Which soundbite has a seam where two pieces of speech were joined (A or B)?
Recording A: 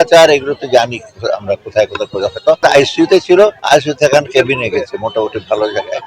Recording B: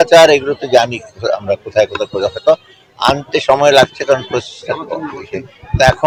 A